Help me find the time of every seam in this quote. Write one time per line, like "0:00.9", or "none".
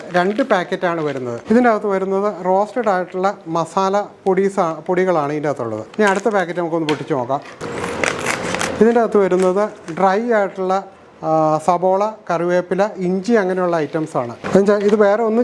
0:01.4
0:05.8